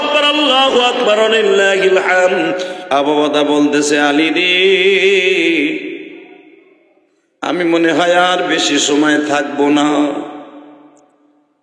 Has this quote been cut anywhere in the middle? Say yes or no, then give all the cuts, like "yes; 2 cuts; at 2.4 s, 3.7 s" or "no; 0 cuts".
yes; 1 cut; at 2.7 s